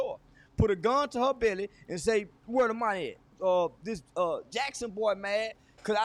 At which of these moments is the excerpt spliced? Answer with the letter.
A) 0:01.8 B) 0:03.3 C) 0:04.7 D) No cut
B